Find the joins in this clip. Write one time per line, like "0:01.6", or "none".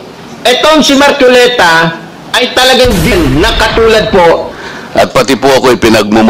0:03.1
0:04.6